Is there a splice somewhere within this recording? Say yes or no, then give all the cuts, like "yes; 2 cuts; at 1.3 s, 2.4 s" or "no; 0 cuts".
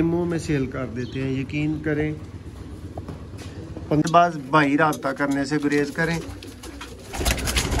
yes; 1 cut; at 4.0 s